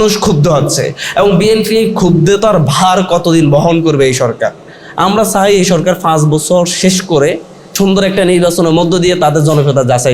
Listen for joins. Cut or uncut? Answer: cut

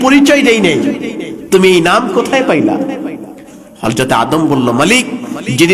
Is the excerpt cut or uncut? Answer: uncut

